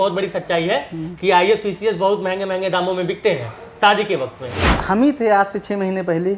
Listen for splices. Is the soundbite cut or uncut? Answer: cut